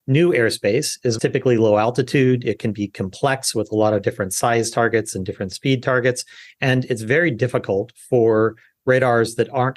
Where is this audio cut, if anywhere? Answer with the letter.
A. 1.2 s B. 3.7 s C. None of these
A